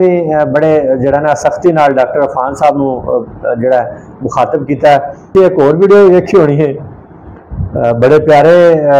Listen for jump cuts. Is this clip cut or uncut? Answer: cut